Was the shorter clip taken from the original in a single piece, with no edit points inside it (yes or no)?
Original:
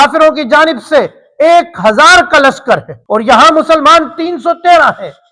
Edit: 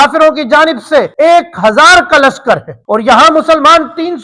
no